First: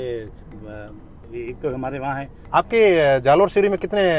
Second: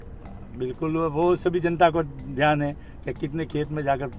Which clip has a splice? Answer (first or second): first